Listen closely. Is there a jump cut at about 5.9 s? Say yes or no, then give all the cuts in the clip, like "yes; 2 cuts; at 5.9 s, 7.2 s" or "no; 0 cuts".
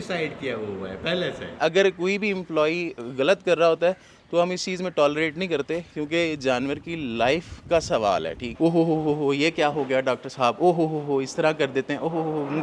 no; 2 cuts; at 1.6 s, 8.5 s